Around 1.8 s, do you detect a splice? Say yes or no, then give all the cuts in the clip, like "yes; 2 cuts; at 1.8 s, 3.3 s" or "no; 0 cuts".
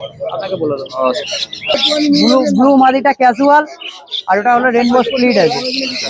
yes; 1 cut; at 1.8 s